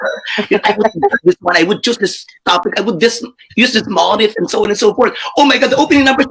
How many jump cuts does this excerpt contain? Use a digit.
0